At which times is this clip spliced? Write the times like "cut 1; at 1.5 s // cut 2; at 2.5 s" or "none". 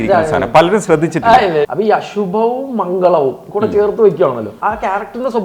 cut 1; at 1.7 s // cut 2; at 4.5 s